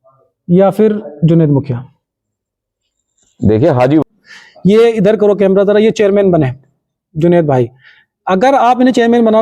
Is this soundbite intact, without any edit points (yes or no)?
no